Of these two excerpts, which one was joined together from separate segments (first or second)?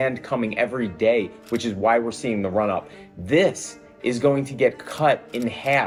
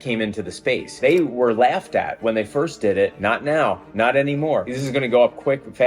second